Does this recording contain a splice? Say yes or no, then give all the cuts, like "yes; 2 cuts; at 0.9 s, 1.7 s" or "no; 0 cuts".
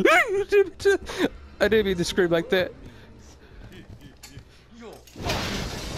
yes; 1 cut; at 1.1 s